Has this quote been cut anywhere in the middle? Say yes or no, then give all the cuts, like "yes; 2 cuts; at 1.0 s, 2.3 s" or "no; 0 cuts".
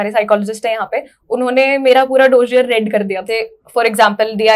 yes; 1 cut; at 3.2 s